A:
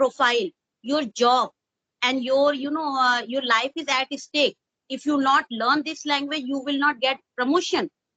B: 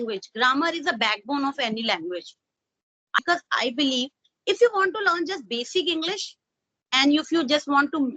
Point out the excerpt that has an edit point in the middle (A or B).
B